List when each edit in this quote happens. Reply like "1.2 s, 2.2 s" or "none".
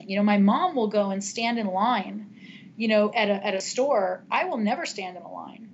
none